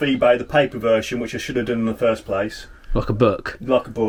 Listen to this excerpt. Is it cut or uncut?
uncut